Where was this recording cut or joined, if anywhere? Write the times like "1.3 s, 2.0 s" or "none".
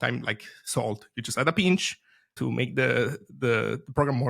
2.3 s

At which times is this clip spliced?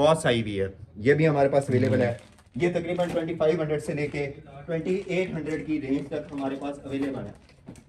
none

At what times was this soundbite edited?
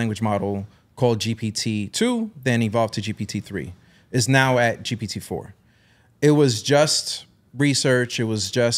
none

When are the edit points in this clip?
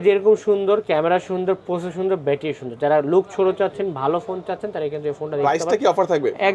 none

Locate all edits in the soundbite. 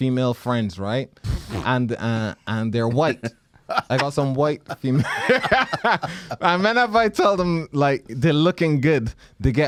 none

